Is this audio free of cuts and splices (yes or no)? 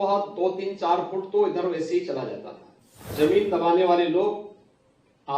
no